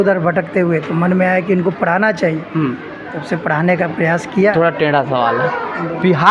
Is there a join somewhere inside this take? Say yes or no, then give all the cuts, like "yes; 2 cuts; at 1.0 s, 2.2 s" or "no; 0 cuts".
yes; 1 cut; at 4.5 s